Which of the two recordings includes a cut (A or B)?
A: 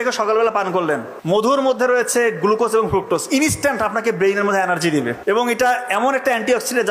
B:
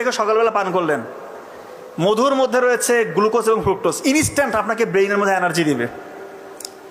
A